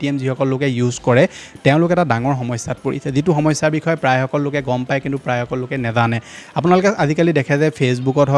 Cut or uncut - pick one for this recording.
uncut